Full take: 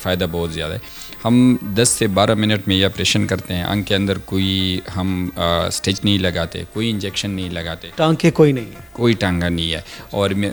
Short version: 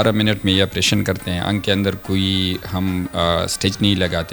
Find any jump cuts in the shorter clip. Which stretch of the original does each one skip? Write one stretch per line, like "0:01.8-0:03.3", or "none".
none